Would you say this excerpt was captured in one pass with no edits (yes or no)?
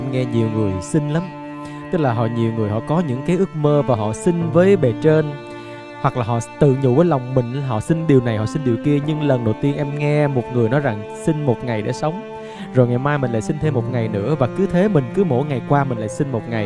yes